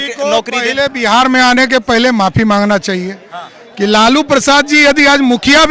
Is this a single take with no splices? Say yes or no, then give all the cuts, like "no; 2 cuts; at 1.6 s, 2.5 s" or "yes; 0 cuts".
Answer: yes; 0 cuts